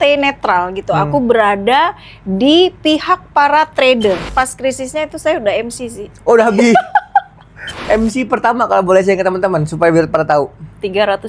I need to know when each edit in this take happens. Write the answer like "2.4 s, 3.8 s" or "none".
4.3 s, 7.7 s